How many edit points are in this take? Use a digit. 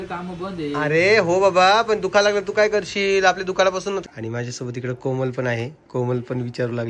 1